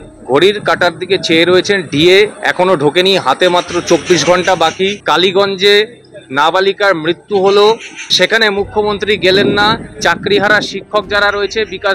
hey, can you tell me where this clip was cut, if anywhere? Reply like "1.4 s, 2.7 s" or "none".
5.0 s, 8.1 s